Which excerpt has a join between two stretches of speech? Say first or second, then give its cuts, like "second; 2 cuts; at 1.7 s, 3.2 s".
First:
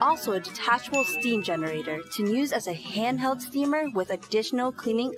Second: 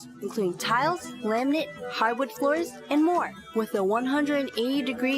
second; 3 cuts; at 1.1 s, 1.8 s, 3.4 s